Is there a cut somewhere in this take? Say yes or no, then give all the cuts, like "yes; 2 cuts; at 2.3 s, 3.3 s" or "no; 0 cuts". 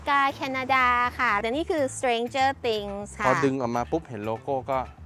yes; 1 cut; at 1.4 s